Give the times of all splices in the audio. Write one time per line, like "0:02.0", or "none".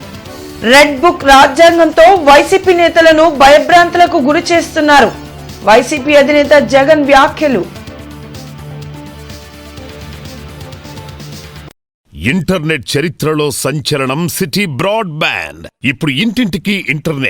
0:12.0

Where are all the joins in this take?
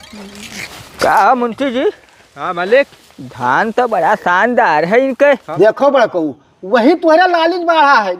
0:05.5

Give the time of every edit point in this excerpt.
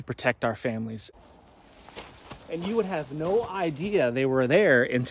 0:01.0

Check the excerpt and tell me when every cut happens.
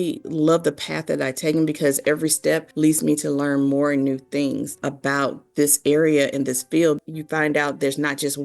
0:04.7

